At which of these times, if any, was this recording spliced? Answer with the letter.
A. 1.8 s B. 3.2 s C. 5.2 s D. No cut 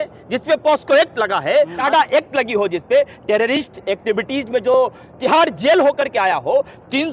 A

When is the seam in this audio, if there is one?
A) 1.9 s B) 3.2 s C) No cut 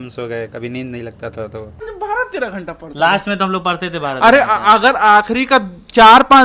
A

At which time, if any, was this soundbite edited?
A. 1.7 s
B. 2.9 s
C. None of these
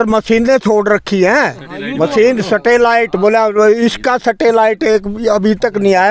C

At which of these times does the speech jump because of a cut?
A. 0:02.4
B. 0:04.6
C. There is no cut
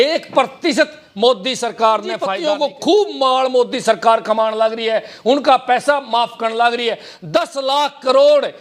A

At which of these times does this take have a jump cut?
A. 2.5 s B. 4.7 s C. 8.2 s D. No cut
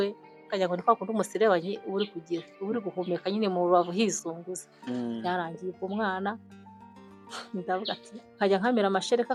D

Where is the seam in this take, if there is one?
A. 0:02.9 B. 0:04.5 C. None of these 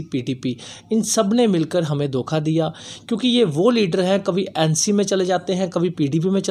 C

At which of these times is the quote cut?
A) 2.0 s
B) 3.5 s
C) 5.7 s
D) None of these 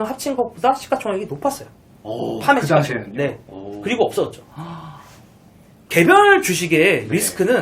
C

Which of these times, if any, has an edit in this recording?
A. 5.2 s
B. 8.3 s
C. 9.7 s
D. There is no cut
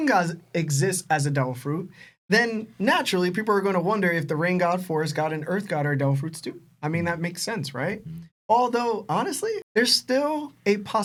D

